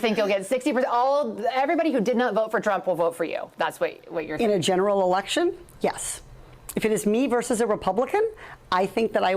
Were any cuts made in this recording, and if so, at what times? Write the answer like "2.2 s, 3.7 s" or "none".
3.7 s